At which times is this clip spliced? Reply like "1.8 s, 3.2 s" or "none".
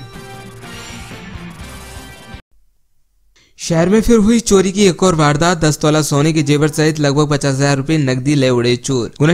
2.6 s